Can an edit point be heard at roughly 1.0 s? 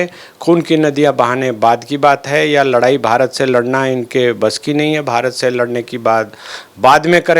no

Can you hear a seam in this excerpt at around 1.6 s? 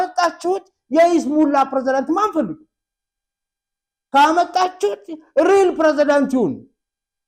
no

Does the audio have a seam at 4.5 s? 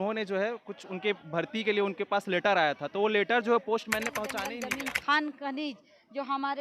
yes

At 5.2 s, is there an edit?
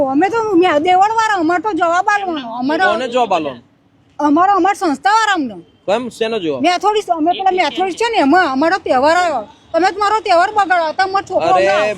no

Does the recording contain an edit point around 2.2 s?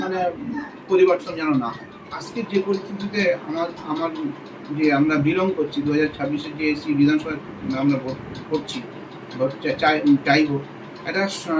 yes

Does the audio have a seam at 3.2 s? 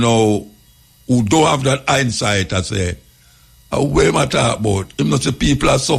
no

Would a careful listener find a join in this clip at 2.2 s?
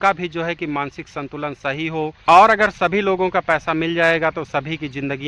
yes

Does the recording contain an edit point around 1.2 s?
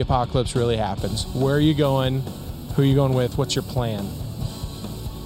yes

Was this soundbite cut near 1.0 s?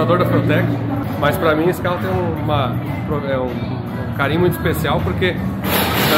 yes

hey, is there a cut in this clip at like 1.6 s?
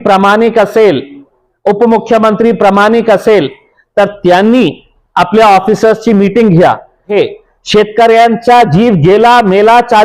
no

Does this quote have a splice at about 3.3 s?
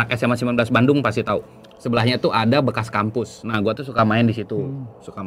no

